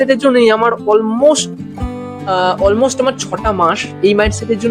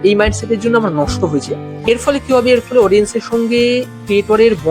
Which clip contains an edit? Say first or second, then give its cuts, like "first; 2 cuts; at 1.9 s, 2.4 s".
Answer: second; 1 cut; at 1.6 s